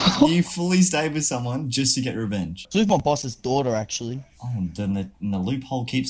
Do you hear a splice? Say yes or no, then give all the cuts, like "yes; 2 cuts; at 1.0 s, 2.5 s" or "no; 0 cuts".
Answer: yes; 1 cut; at 2.6 s